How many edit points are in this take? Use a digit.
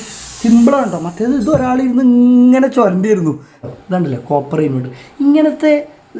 1